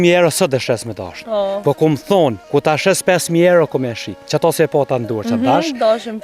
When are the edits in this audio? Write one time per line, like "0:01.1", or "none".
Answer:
0:02.4